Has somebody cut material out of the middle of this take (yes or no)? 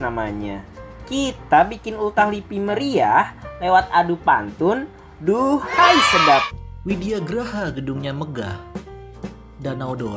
yes